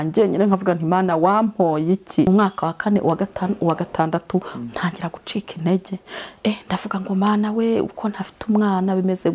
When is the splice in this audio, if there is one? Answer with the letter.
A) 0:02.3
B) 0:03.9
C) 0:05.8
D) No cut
A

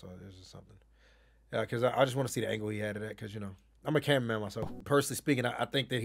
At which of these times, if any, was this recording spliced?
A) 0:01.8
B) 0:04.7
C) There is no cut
B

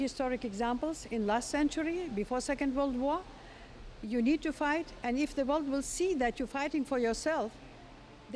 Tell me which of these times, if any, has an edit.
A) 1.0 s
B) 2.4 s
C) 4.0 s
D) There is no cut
D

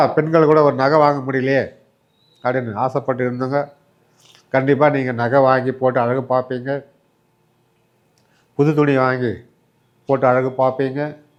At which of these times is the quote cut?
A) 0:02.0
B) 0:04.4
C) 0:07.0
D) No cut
D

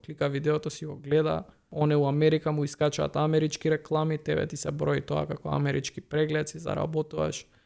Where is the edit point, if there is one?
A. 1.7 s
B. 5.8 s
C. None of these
A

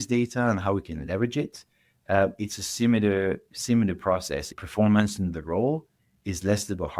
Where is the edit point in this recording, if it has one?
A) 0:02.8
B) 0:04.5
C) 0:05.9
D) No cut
B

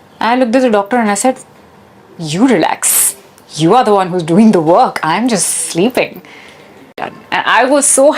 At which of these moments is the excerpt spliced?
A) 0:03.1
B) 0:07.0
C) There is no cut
B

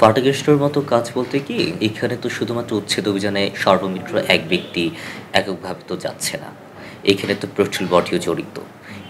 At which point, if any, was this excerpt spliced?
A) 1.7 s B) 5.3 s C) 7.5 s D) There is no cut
A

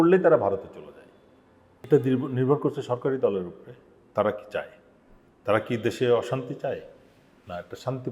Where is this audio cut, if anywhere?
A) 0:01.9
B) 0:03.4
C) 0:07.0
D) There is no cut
A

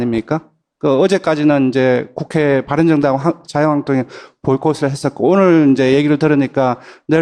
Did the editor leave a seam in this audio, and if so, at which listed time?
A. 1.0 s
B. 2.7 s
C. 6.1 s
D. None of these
D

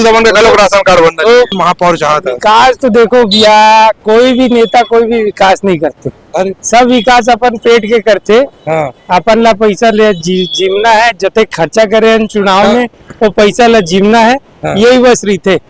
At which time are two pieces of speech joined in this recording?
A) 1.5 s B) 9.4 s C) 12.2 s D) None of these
A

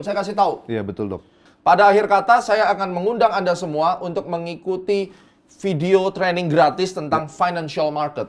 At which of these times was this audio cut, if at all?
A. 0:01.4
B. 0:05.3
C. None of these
A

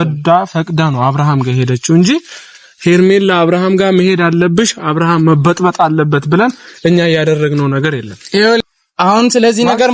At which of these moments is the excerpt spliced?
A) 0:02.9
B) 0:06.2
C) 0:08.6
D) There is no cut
C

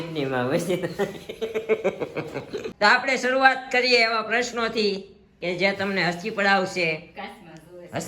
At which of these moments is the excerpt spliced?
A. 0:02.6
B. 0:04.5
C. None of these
A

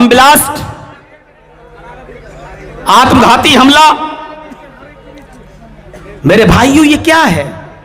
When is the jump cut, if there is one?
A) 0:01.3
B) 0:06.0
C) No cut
A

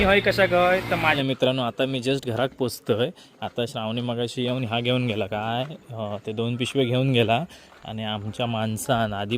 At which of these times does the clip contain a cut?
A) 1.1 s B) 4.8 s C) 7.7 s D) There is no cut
A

